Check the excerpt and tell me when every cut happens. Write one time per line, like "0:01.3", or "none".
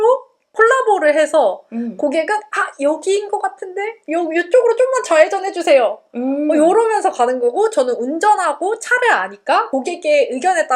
none